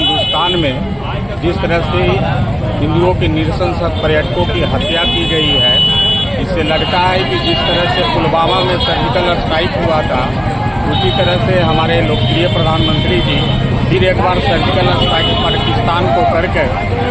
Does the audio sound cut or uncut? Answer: uncut